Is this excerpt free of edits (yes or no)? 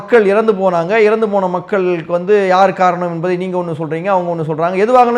yes